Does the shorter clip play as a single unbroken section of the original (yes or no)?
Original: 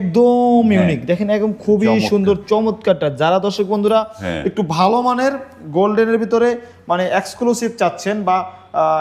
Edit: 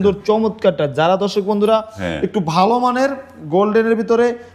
yes